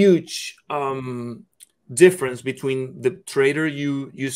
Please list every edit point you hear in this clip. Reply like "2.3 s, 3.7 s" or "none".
none